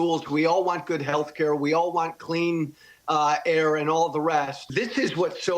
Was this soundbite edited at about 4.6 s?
yes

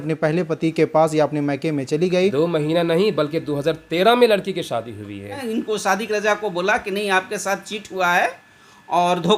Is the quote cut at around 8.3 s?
no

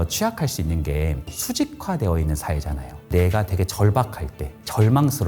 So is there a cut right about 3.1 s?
yes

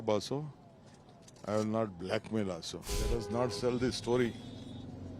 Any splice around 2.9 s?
yes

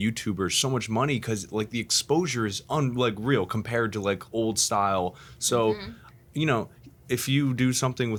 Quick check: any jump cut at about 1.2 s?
no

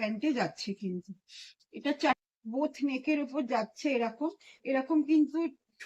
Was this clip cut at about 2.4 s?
yes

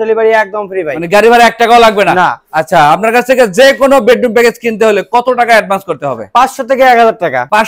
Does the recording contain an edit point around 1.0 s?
no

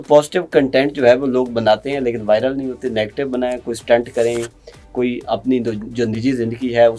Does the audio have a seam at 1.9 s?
no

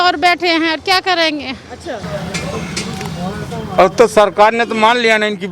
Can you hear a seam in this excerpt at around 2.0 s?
yes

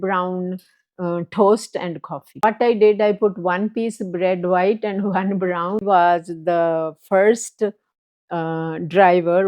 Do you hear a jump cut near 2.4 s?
yes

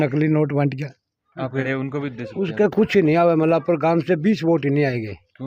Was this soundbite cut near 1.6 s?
yes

